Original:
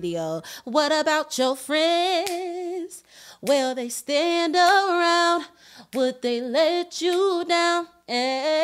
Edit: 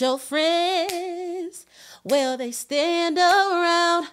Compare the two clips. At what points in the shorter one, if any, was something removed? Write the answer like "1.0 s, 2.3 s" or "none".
none